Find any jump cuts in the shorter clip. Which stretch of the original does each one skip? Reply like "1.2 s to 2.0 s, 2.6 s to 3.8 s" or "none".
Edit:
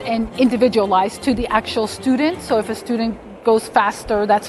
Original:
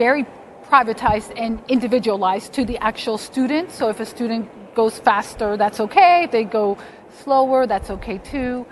none